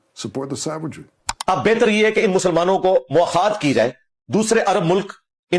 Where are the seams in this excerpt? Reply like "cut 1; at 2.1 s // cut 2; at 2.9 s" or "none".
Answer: cut 1; at 1.2 s